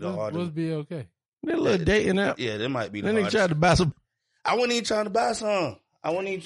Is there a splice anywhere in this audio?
yes; 1 cut; at 3.9 s

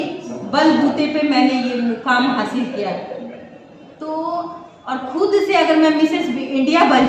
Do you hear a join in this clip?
no; 0 cuts

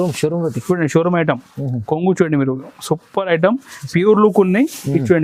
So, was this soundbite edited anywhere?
no; 0 cuts

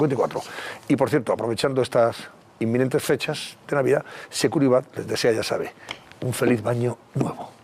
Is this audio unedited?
no; 1 cut; at 4.7 s

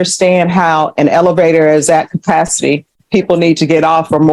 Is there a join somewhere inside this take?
no; 0 cuts

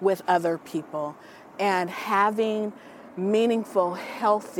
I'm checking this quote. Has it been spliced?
no; 0 cuts

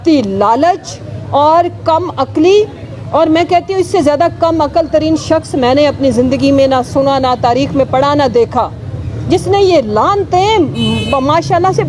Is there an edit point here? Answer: no; 0 cuts

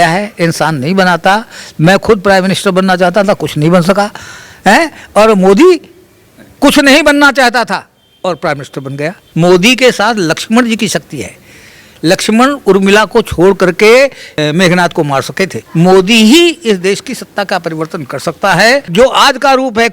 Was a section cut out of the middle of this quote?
yes; 4 cuts; at 9.2 s, 14.4 s, 15.6 s, 18.9 s

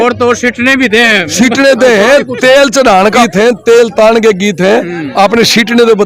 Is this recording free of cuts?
no; 1 cut; at 3.2 s

